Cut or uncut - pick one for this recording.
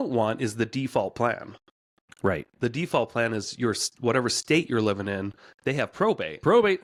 uncut